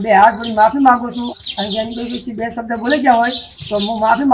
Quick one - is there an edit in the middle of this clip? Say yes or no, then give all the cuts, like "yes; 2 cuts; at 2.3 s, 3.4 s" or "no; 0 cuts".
yes; 1 cut; at 1.3 s